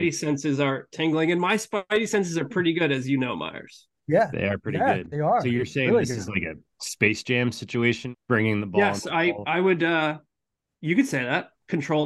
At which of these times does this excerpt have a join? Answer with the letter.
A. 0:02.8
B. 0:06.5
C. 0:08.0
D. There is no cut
C